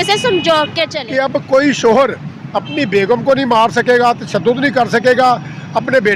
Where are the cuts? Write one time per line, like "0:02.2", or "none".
0:01.5